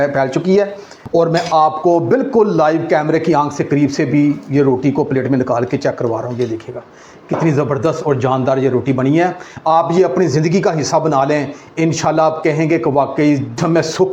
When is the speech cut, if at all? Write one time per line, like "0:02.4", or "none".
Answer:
0:00.9